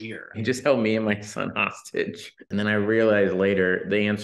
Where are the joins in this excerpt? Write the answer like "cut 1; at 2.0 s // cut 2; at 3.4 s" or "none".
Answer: cut 1; at 2.3 s